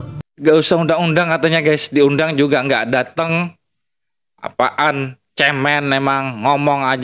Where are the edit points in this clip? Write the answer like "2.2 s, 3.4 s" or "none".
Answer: none